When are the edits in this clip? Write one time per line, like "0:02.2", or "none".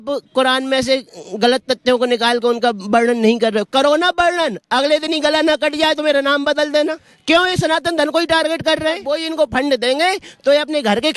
0:07.1
0:09.1